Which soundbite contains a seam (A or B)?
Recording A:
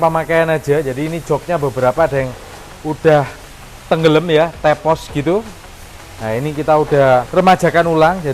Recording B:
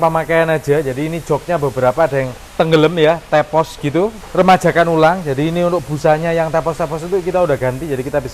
B